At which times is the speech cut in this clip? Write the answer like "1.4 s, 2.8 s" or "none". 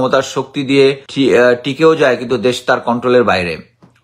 1.1 s